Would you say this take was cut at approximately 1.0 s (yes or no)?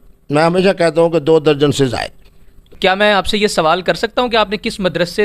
no